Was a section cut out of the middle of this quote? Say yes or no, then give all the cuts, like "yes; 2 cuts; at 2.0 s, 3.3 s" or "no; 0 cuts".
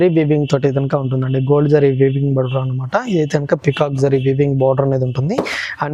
no; 0 cuts